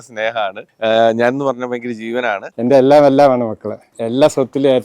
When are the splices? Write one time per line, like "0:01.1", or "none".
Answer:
0:02.5